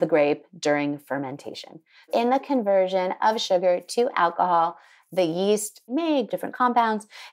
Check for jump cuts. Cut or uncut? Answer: cut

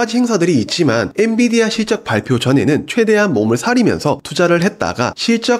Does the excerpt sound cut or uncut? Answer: uncut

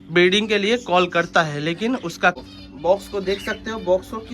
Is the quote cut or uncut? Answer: cut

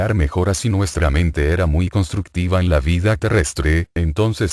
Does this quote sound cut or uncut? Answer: cut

